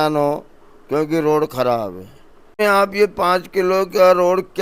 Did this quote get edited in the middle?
yes; 1 cut; at 2.6 s

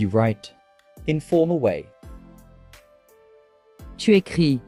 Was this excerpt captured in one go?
yes; 0 cuts

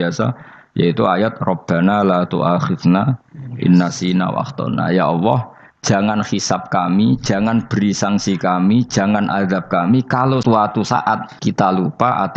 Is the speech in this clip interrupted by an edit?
yes; 2 cuts; at 10.4 s, 11.3 s

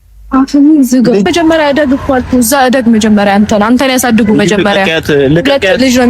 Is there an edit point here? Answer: yes; 1 cut; at 1.3 s

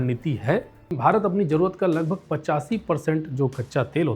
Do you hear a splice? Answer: yes; 1 cut; at 0.9 s

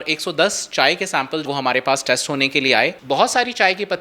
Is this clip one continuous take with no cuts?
no; 2 cuts; at 1.4 s, 3.0 s

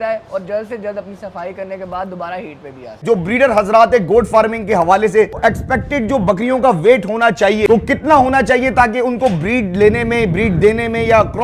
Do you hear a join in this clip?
yes; 3 cuts; at 3.0 s, 5.4 s, 7.7 s

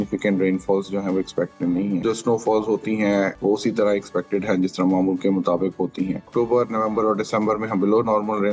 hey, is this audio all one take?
no; 3 cuts; at 2.0 s, 3.4 s, 6.3 s

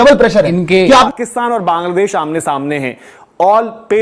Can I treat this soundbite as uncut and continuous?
no; 2 cuts; at 1.1 s, 3.0 s

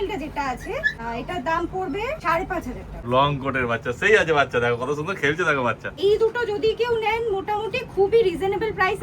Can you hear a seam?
yes; 3 cuts; at 0.9 s, 2.6 s, 6.0 s

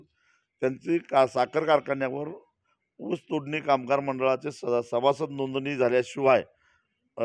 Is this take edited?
no; 0 cuts

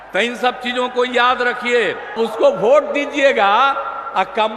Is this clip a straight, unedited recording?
no; 1 cut; at 2.2 s

